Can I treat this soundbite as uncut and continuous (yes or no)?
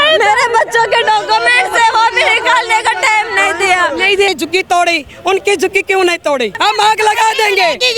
no